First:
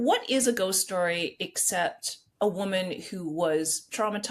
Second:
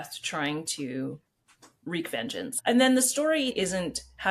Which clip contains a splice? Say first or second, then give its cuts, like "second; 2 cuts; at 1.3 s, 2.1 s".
second; 3 cuts; at 1.8 s, 2.5 s, 3.5 s